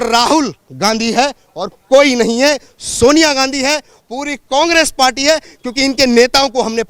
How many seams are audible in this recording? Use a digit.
0